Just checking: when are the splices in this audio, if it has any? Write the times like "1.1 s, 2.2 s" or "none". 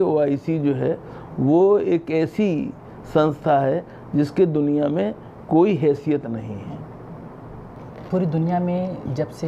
none

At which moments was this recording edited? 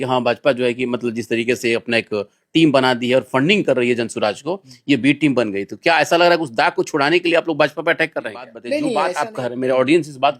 9.0 s

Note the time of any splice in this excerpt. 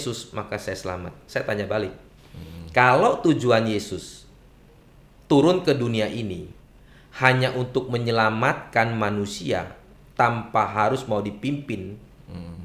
none

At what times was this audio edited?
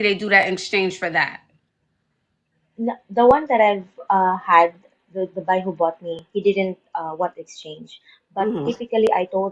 none

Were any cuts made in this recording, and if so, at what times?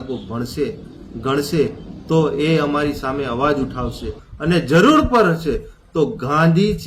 4.2 s

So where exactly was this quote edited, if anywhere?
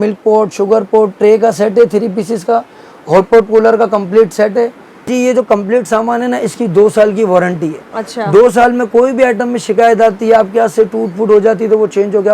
5.1 s

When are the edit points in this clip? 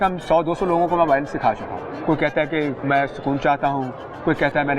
1.9 s, 2.8 s

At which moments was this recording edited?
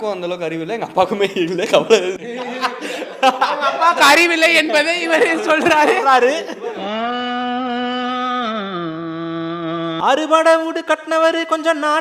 10.0 s

